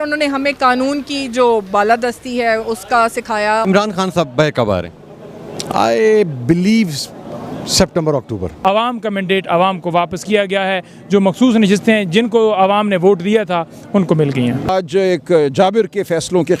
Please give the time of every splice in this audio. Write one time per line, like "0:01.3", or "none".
0:03.6
0:08.6
0:14.7